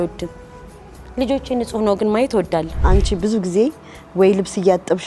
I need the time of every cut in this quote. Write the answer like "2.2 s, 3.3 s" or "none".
2.7 s